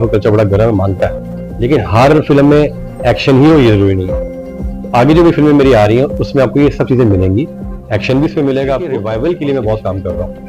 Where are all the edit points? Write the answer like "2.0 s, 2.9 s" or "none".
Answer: 8.9 s